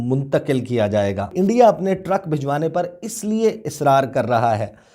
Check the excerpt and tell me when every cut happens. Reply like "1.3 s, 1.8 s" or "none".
1.3 s